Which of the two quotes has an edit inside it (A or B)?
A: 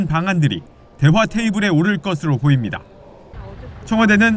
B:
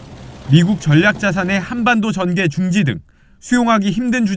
B